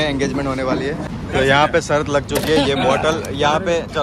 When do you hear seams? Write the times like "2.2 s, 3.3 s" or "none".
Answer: 1.2 s